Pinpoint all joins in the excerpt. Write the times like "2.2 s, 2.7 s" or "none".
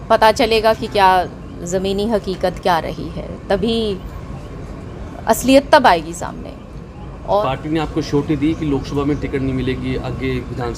7.4 s